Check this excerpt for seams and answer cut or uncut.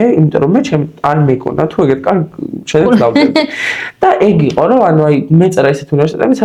uncut